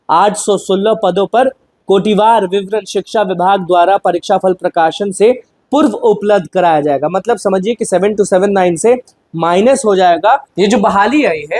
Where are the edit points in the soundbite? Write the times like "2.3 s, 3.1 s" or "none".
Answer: 10.4 s